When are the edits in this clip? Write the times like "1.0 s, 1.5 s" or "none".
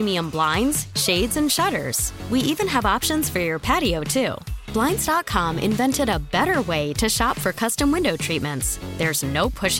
none